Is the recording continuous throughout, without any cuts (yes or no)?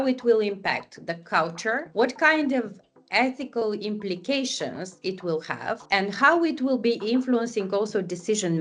no